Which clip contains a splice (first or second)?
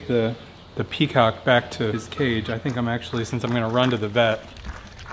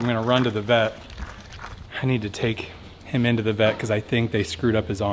first